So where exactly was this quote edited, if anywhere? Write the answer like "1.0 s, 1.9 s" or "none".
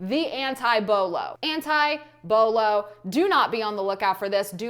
1.4 s